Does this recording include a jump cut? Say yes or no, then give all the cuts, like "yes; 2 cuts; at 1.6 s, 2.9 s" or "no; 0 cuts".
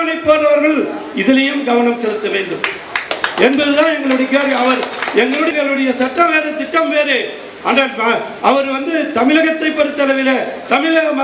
yes; 1 cut; at 5.5 s